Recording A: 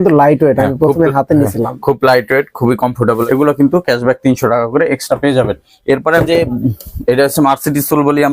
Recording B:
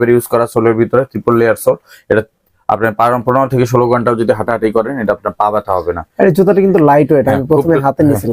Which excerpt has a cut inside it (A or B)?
A